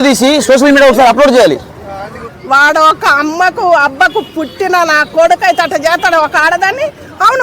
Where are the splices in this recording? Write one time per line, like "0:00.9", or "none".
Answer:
0:02.2